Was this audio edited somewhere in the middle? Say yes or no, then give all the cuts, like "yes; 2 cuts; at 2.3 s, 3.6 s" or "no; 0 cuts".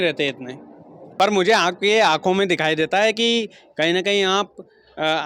yes; 1 cut; at 1.0 s